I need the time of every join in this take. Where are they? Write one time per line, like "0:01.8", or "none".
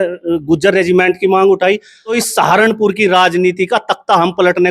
0:02.0